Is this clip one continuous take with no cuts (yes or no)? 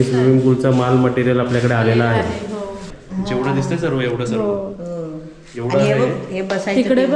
no